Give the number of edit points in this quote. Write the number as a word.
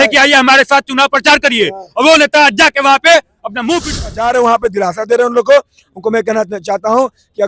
one